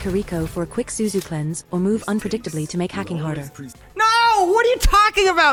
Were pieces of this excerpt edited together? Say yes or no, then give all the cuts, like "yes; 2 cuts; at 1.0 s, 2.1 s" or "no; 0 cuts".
no; 0 cuts